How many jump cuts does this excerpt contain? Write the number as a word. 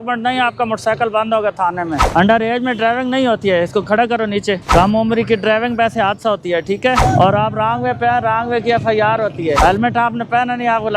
four